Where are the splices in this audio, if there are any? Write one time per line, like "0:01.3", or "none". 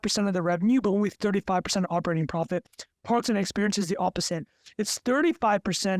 none

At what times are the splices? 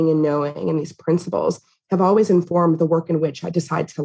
0:02.5

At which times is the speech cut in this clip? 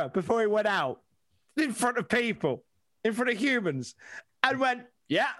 none

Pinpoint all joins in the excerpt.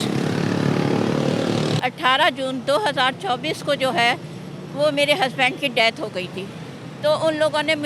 0:01.8

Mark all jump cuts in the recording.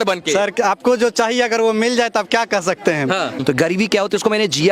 0:03.4

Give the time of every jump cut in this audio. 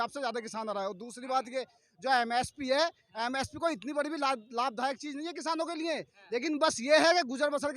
none

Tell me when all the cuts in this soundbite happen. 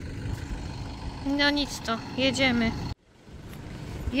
0:03.0

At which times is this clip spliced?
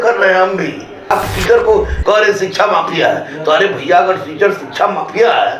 0:01.1

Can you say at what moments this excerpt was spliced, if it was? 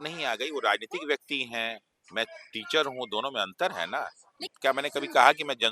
0:04.4

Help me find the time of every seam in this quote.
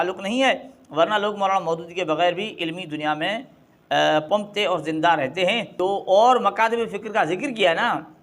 0:05.7

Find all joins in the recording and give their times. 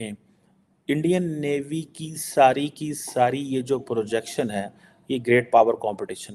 none

